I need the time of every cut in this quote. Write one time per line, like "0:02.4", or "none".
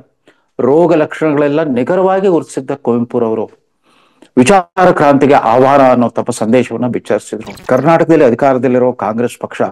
0:07.5